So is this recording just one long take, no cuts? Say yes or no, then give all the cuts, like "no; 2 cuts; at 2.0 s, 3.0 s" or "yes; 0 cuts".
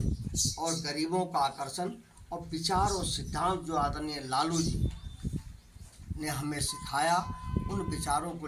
yes; 0 cuts